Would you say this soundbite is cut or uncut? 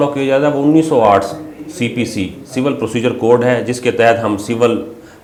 uncut